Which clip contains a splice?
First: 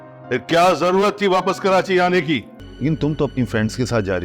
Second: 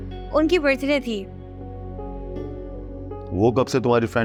first; 1 cut; at 2.6 s

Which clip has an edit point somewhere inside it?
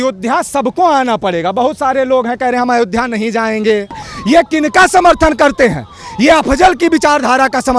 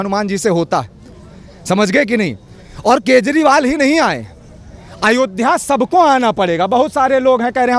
first; 1 cut; at 4.1 s

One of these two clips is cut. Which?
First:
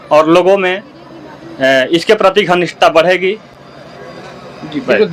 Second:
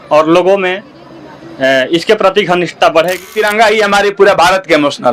second; 1 cut; at 3.4 s

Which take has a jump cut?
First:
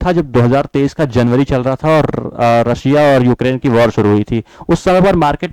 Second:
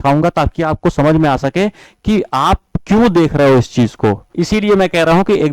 second; 1 cut; at 4.3 s

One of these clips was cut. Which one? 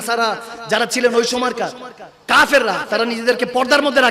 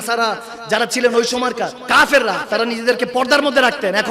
second; 1 cut; at 1.8 s

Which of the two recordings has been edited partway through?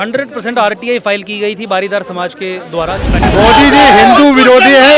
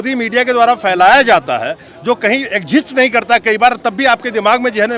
first; 1 cut; at 3.3 s

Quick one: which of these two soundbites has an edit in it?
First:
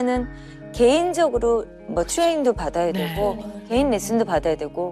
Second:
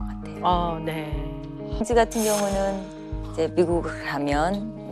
second; 1 cut; at 1.8 s

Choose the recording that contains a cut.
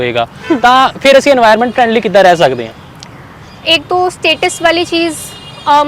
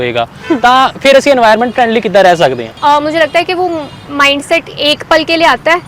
second; 1 cut; at 2.7 s

